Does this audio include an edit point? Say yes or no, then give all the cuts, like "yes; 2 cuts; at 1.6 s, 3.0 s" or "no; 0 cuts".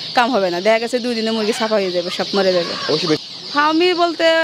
yes; 1 cut; at 3.2 s